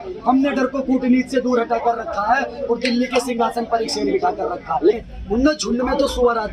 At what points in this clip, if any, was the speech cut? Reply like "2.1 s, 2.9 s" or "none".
5.1 s